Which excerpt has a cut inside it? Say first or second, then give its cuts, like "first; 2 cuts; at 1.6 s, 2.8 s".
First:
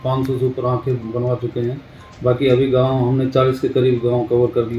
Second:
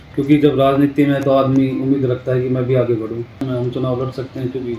second; 1 cut; at 3.5 s